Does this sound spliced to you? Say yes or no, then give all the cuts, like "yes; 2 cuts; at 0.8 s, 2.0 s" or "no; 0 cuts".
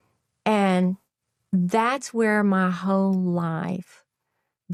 no; 0 cuts